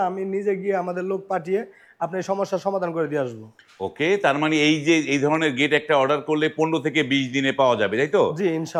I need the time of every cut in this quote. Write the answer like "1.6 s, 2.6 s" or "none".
none